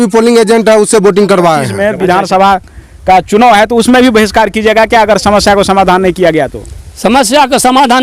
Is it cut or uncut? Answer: cut